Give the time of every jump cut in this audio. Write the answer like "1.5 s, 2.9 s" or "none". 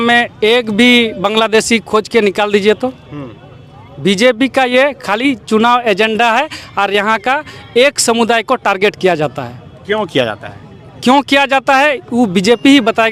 none